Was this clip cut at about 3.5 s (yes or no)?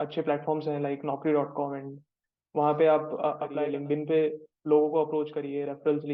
yes